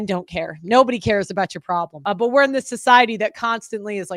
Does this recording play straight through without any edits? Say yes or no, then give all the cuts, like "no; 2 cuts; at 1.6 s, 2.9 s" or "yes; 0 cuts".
no; 1 cut; at 1.9 s